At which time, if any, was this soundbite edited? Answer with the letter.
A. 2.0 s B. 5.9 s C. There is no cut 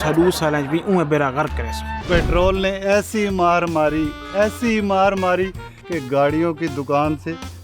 A